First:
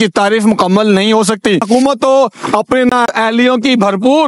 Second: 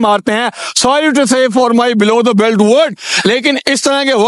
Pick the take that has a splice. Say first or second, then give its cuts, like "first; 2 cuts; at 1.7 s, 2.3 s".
first; 1 cut; at 1.6 s